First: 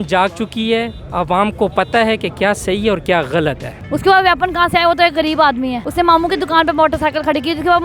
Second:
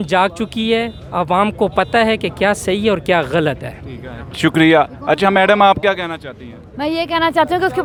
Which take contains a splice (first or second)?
first